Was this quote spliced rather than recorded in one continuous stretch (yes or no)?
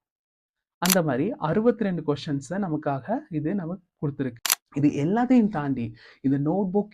yes